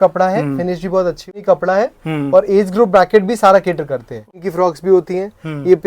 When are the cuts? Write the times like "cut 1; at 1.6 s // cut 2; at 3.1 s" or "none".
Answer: cut 1; at 1.4 s // cut 2; at 4.4 s